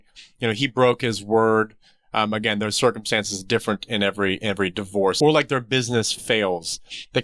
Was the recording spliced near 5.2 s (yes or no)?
yes